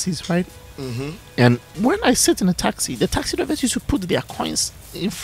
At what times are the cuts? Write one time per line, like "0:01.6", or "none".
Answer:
0:01.7